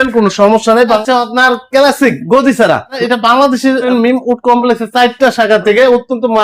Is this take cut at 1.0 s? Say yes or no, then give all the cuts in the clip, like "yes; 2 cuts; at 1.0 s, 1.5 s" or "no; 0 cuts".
yes; 3 cuts; at 1.0 s, 2.9 s, 3.9 s